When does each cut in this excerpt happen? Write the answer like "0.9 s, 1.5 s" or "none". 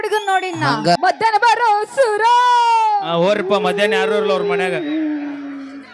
1.0 s